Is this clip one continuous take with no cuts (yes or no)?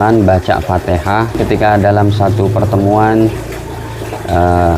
no